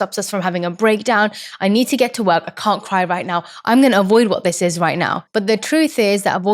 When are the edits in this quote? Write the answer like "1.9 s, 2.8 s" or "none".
5.2 s